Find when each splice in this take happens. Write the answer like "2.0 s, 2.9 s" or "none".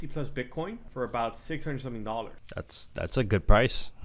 0.8 s, 2.8 s